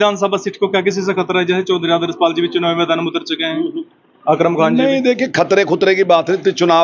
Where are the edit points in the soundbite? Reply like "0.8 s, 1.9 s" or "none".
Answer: none